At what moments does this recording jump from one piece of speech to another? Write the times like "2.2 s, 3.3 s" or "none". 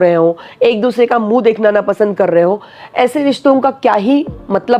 none